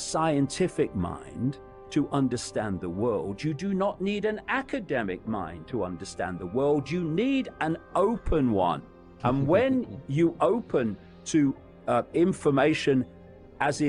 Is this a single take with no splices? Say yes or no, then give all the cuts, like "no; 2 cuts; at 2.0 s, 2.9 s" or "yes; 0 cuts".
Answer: yes; 0 cuts